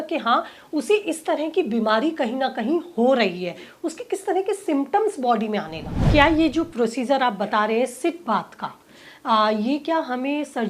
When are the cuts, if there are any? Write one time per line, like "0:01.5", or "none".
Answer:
0:06.0